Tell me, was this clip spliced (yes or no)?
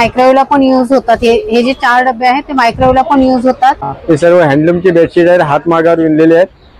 yes